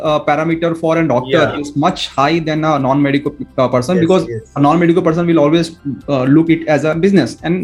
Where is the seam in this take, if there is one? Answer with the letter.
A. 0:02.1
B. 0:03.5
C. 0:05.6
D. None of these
D